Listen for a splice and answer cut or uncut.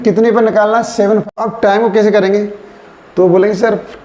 cut